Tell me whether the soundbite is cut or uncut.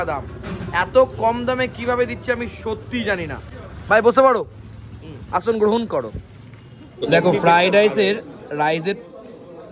uncut